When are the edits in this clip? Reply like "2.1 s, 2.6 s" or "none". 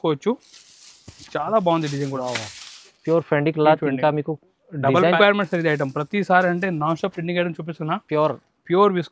5.2 s